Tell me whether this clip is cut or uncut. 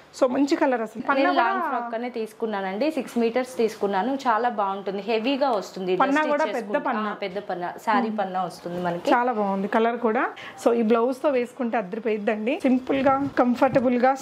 cut